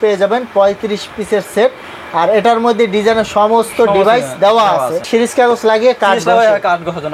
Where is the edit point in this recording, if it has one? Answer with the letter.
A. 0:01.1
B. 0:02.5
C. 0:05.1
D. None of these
C